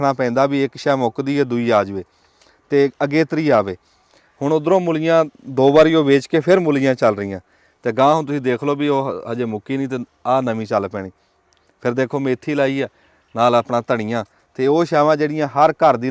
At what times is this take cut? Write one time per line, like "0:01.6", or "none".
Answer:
none